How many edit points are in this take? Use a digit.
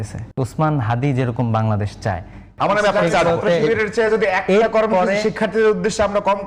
1